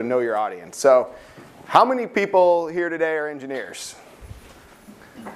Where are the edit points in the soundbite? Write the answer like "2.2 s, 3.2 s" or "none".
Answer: none